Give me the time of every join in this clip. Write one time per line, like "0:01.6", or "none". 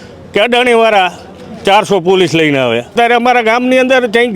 0:02.9